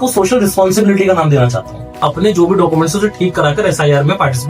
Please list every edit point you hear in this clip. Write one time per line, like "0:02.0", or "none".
0:02.0